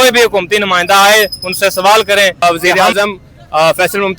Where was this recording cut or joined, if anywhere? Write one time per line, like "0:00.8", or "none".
0:02.4